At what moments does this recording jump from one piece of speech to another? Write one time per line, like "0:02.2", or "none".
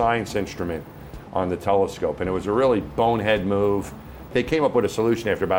0:04.3